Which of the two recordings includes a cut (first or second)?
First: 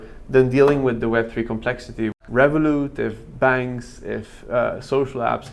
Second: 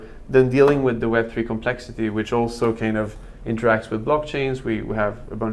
first